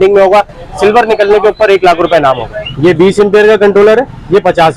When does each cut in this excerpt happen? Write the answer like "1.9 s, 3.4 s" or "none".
2.5 s